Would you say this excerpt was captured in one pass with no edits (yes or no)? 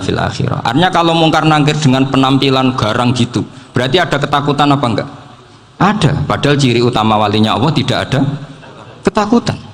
yes